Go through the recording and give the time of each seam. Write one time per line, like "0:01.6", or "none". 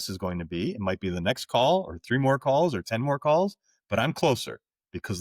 none